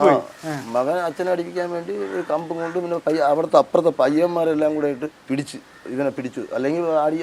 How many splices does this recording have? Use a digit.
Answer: 1